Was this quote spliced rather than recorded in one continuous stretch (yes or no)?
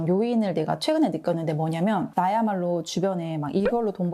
yes